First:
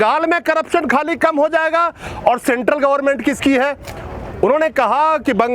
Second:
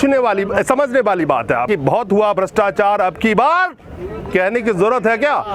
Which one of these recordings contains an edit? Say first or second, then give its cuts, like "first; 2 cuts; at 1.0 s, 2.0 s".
second; 1 cut; at 1.6 s